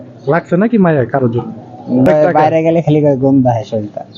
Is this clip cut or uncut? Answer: cut